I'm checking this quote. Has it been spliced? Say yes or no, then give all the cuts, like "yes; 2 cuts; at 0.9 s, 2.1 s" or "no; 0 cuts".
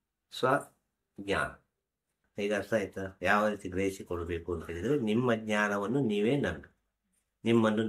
yes; 1 cut; at 2.2 s